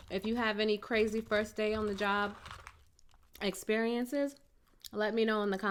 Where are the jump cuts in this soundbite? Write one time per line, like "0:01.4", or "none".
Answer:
none